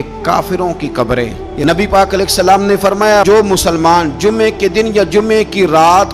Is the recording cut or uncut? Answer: cut